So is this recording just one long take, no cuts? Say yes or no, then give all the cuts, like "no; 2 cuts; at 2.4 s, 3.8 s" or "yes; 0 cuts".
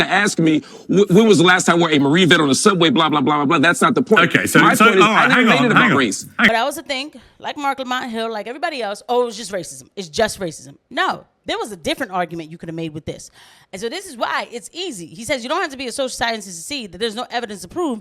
no; 1 cut; at 6.5 s